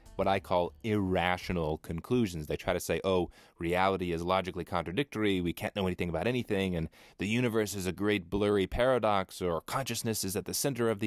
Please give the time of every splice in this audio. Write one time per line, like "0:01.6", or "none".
0:01.5